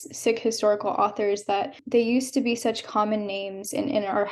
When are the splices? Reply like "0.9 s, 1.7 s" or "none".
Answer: 1.8 s

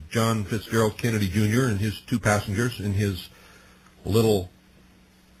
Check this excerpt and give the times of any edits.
1.0 s

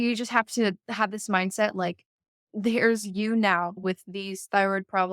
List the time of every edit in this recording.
3.8 s

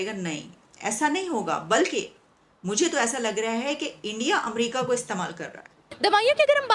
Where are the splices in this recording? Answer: 5.8 s

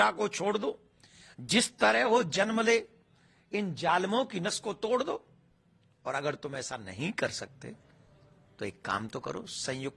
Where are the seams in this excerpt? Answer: none

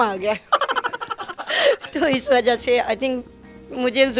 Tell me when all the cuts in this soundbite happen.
none

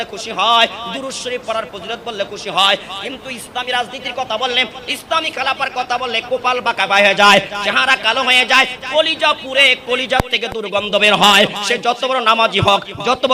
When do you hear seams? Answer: none

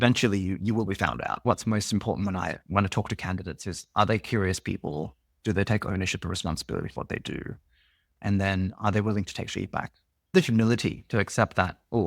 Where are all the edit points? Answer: 1.5 s, 2.6 s, 10.3 s

